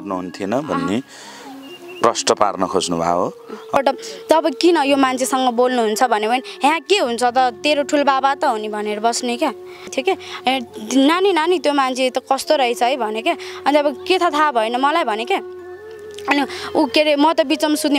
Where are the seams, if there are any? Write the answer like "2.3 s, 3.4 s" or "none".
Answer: 3.8 s, 9.9 s